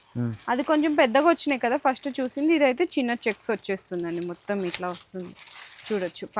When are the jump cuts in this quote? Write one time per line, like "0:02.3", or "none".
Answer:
none